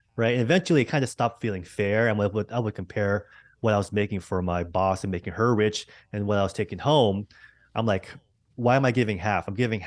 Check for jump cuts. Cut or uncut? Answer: uncut